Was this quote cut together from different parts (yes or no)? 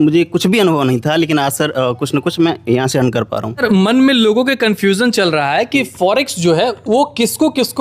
yes